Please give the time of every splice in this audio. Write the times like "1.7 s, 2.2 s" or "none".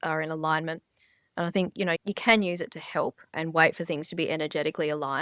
2.0 s, 3.4 s